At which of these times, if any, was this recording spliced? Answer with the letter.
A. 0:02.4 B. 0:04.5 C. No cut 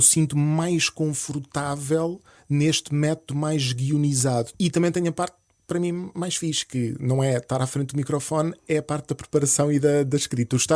B